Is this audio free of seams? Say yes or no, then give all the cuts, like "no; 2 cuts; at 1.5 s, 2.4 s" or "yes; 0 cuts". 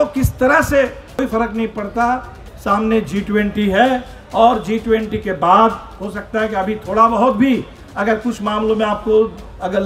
no; 1 cut; at 1.2 s